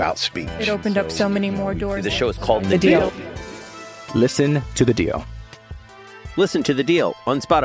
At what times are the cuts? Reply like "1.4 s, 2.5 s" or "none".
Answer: none